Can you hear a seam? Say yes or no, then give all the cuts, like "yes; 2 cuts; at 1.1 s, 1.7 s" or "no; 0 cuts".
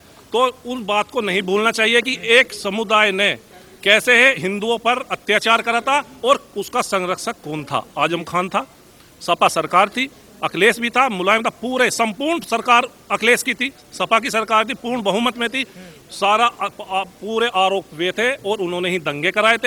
no; 0 cuts